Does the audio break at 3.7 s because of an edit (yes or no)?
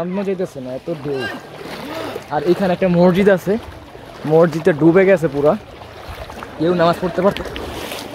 no